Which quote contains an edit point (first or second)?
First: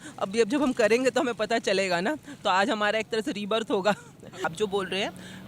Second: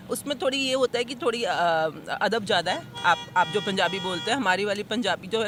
first